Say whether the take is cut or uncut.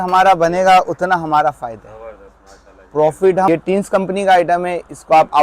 cut